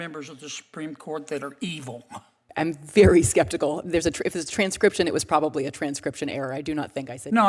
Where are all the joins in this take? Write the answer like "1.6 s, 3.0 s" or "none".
2.4 s